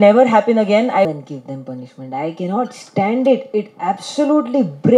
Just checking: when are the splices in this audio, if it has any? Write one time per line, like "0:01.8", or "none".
0:01.1

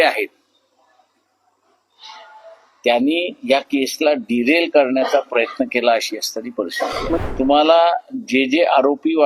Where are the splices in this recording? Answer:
0:07.2

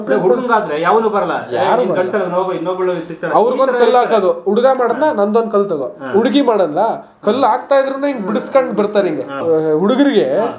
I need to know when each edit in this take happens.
0:09.3

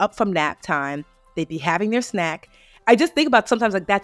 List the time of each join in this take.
0:02.7

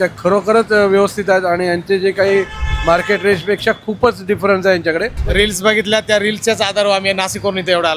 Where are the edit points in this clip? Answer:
0:05.2

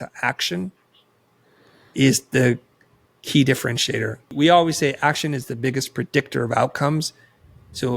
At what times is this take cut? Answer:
0:04.3

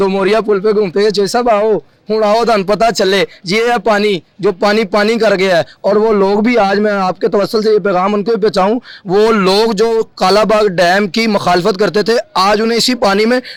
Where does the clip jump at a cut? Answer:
none

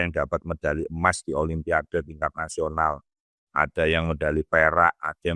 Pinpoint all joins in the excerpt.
none

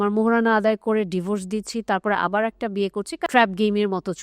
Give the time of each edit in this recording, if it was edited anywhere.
0:03.2

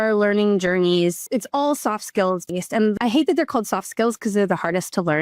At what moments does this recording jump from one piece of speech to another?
0:01.2
0:02.9

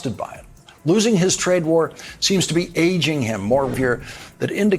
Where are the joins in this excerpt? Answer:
0:03.7

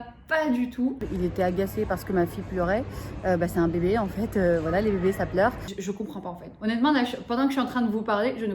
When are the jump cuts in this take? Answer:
0:01.0
0:05.6

